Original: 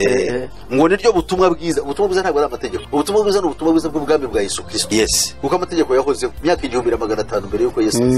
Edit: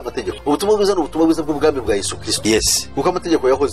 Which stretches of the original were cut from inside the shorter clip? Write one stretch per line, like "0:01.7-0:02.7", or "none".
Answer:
none